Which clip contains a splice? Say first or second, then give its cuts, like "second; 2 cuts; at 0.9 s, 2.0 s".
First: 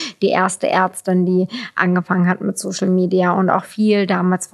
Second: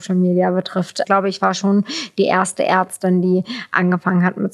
second; 1 cut; at 1.0 s